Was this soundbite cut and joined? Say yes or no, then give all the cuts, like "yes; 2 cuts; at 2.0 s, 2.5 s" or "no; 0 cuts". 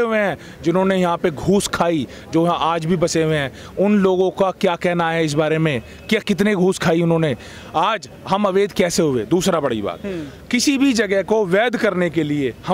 no; 0 cuts